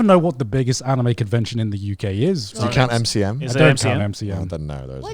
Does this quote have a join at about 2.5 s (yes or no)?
yes